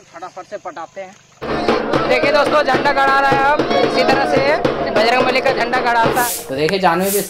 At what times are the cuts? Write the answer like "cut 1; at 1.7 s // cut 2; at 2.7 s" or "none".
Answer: cut 1; at 1.5 s // cut 2; at 6.3 s